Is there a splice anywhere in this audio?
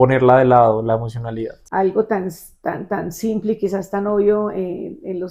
yes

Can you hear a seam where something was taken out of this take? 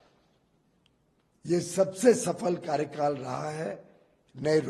no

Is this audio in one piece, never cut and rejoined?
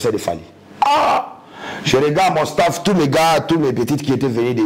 yes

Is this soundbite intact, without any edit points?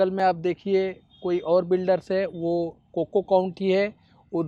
yes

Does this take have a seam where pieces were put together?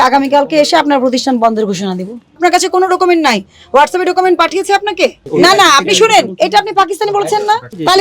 yes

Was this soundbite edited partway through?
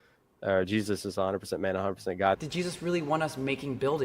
yes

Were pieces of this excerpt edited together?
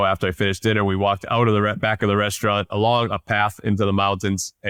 no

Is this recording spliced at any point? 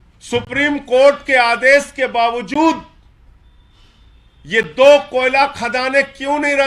no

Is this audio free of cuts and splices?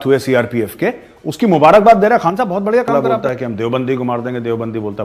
no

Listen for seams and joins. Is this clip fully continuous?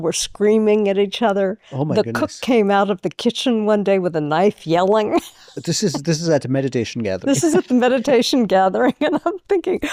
yes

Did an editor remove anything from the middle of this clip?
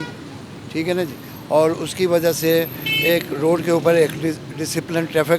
no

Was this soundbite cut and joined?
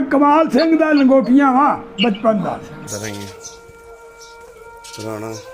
yes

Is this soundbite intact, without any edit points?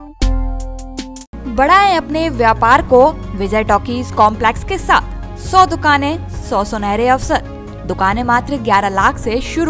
yes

